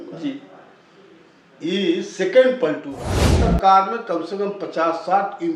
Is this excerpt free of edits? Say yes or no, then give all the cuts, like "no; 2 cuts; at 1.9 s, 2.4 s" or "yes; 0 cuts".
no; 1 cut; at 3.4 s